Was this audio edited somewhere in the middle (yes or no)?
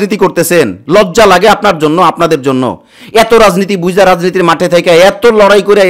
no